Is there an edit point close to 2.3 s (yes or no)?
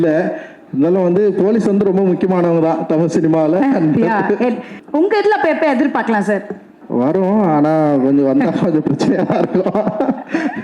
no